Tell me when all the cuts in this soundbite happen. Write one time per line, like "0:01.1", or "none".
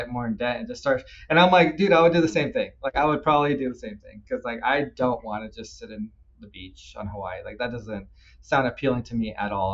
none